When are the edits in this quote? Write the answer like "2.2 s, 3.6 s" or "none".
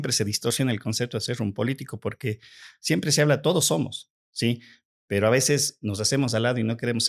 none